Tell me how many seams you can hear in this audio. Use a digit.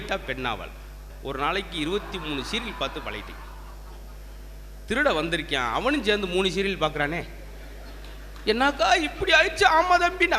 1